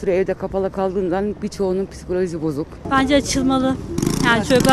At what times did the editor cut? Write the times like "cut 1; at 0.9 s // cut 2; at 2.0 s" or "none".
cut 1; at 2.8 s